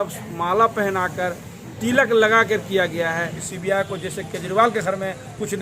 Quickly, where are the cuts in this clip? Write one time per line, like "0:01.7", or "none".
0:03.4